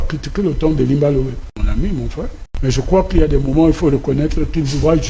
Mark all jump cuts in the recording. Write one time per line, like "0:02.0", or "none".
0:01.6
0:02.4